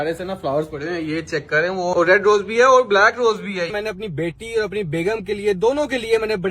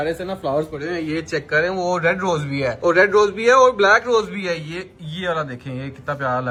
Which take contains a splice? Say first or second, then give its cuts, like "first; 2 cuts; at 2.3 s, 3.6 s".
first; 2 cuts; at 1.9 s, 3.7 s